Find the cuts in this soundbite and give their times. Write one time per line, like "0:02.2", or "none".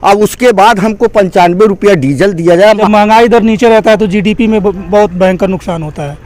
0:02.8